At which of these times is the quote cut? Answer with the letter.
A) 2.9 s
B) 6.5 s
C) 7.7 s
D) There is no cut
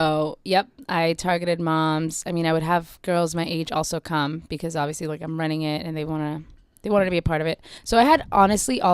C